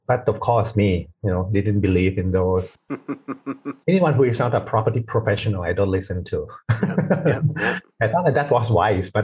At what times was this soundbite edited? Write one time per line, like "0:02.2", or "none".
0:03.7